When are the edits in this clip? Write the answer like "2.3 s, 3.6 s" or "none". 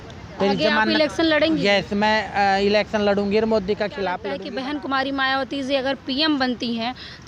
4.3 s